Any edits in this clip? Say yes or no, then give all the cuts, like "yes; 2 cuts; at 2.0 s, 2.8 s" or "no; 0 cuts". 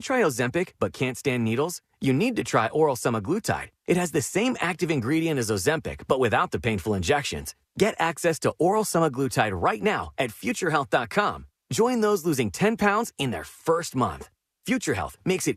no; 0 cuts